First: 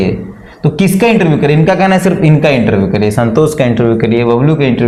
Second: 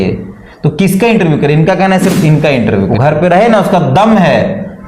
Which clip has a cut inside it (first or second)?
second